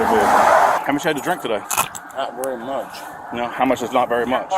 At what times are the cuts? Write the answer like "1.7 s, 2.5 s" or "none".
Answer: 0.8 s, 1.7 s